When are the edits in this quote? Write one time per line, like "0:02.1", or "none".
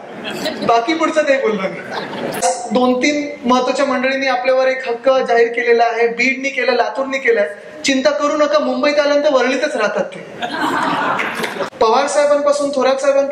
0:02.4
0:11.6